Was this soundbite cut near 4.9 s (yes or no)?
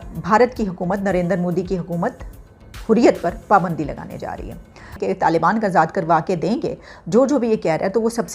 yes